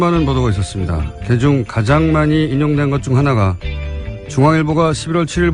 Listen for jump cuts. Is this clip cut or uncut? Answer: uncut